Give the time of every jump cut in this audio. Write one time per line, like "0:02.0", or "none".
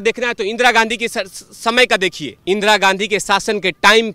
0:02.3